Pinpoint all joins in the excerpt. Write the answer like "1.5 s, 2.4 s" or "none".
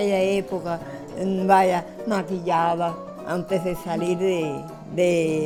none